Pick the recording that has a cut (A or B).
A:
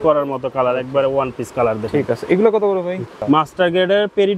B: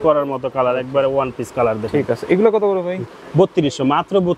A